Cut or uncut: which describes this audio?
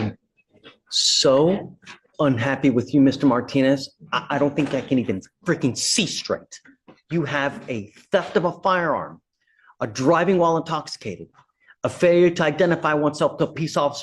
uncut